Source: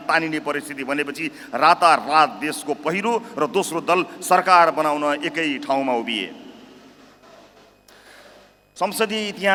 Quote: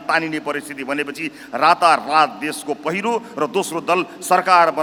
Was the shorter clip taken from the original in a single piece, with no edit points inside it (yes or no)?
yes